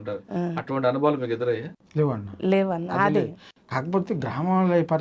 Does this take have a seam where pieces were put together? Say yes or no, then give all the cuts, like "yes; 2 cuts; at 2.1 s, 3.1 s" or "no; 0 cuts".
no; 0 cuts